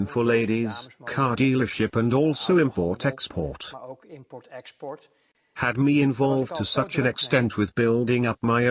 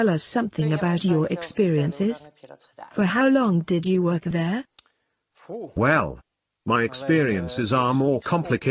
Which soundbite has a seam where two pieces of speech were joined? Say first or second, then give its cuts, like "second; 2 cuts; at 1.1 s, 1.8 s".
first; 1 cut; at 1.0 s